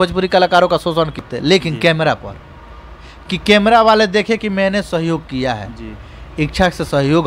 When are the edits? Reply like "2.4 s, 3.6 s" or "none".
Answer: 1.3 s